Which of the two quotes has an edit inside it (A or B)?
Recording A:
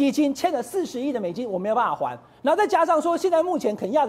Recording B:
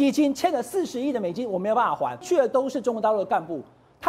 B